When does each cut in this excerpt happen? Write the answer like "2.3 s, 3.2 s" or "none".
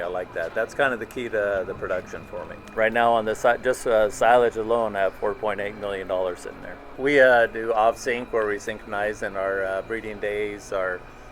2.6 s, 7.0 s

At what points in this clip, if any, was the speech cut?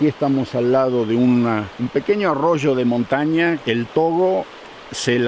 1.7 s, 3.6 s

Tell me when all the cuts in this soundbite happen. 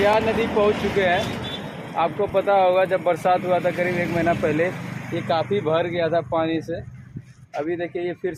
none

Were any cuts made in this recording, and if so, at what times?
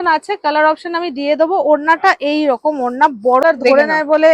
3.4 s

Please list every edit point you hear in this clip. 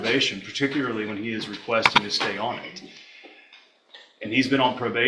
none

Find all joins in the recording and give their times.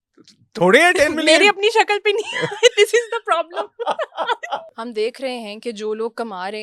4.7 s

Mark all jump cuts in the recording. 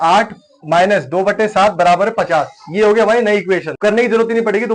3.7 s

